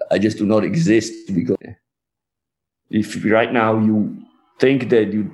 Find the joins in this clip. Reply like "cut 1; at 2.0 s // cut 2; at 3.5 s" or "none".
cut 1; at 1.6 s

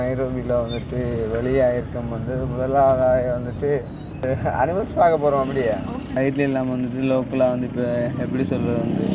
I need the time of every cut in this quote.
cut 1; at 4.2 s // cut 2; at 6.0 s

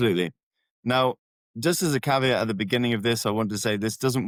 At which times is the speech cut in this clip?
none

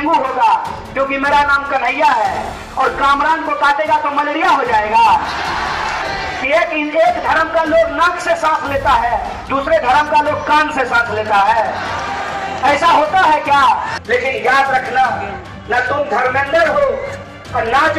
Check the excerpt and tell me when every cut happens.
cut 1; at 6.0 s // cut 2; at 13.9 s

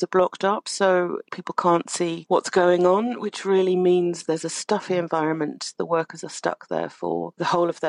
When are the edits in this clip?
cut 1; at 3.4 s

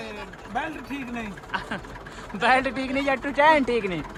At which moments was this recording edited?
none

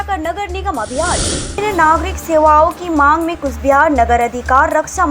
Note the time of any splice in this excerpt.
cut 1; at 1.5 s

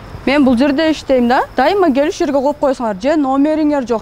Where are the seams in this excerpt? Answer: none

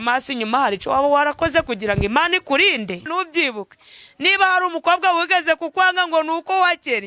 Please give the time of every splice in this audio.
cut 1; at 3.1 s

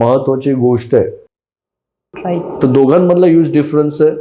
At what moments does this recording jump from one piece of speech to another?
none

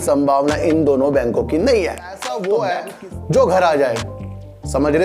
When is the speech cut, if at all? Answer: cut 1; at 2.1 s

